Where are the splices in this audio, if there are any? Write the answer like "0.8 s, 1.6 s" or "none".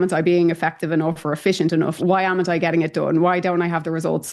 none